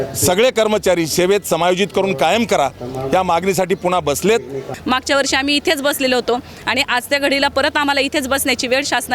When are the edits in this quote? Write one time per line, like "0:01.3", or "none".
0:04.7